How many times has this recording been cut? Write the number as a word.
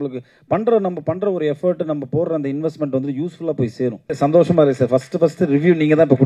one